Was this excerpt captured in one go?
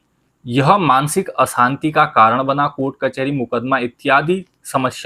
yes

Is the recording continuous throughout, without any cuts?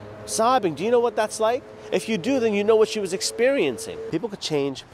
no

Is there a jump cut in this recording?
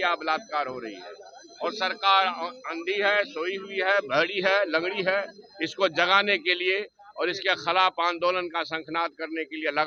no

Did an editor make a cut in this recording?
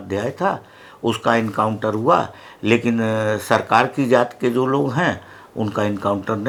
no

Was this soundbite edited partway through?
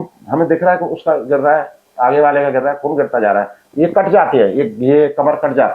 no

